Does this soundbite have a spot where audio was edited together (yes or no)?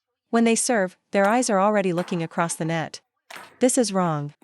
yes